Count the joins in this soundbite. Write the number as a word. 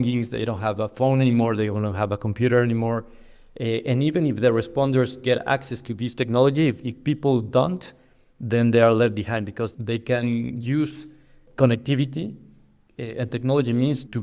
zero